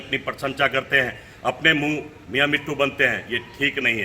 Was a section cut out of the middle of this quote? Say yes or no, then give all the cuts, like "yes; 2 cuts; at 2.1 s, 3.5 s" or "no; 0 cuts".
yes; 1 cut; at 2.2 s